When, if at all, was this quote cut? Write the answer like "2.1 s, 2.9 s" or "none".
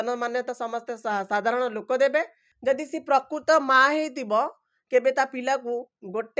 2.4 s

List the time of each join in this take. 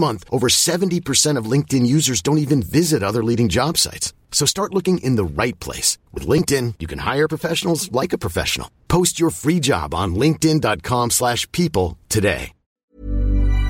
12.7 s

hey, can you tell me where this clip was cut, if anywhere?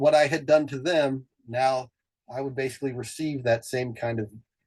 none

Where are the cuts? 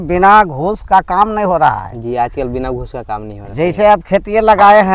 none

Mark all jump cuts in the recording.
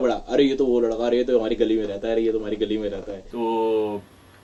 none

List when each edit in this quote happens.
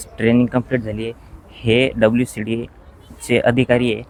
none

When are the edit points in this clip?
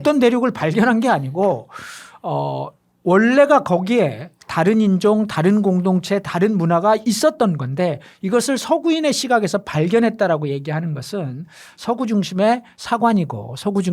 none

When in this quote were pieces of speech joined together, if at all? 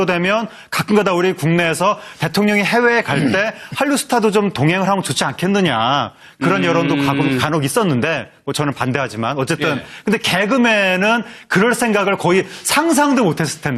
11.4 s

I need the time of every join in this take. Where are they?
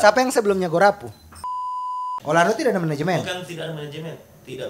1.6 s

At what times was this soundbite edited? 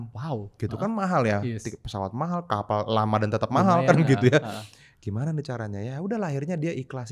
none

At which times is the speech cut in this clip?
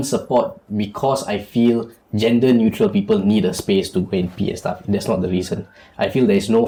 none

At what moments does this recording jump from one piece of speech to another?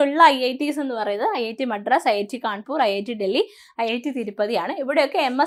none

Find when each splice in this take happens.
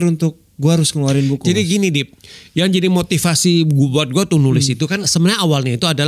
5.1 s

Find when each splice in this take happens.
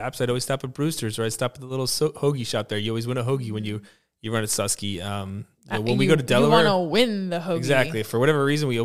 none

